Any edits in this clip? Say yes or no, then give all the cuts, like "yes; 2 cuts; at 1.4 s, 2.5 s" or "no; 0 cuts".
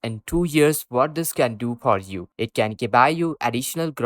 no; 0 cuts